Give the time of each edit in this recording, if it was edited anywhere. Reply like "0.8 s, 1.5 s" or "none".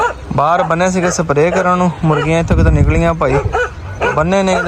none